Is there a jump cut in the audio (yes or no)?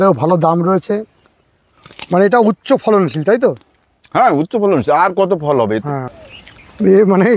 yes